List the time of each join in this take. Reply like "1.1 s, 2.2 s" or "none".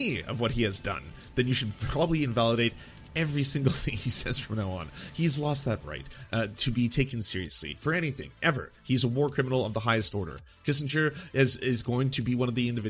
none